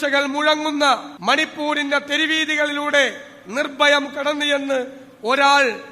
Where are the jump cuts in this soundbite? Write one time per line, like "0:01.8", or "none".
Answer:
0:01.1